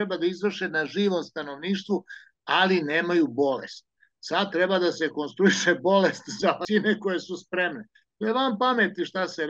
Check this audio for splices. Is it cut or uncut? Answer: cut